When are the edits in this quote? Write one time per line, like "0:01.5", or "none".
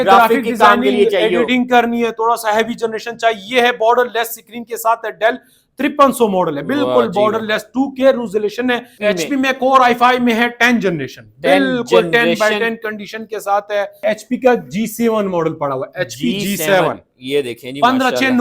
0:08.9
0:14.0